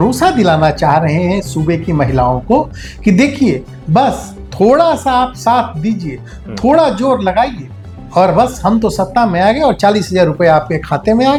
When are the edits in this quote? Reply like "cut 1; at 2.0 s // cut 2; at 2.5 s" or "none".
none

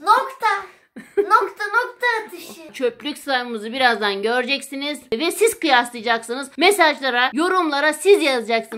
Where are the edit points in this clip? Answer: cut 1; at 2.7 s // cut 2; at 5.1 s // cut 3; at 6.4 s // cut 4; at 7.3 s

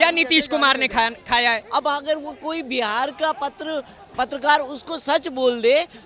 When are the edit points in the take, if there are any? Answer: cut 1; at 1.6 s

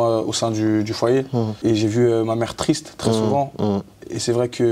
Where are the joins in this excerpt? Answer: cut 1; at 1.5 s

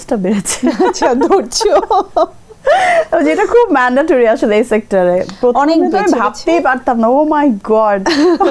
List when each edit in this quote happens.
none

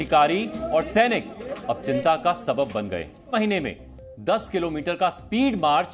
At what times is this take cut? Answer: cut 1; at 3.3 s

